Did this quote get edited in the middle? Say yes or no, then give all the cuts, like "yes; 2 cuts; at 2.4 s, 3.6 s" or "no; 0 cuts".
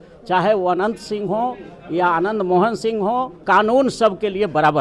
yes; 1 cut; at 3.4 s